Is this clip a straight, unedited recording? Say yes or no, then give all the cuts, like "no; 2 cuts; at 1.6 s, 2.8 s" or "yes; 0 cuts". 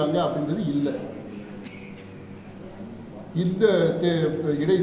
yes; 0 cuts